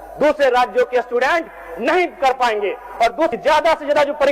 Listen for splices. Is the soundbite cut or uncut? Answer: cut